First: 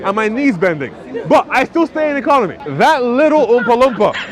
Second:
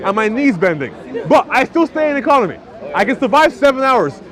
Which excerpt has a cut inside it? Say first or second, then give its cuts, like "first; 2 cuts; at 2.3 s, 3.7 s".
first; 1 cut; at 2.6 s